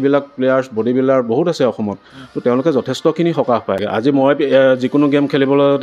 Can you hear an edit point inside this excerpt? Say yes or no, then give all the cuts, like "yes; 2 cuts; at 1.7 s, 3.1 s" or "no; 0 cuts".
yes; 1 cut; at 3.8 s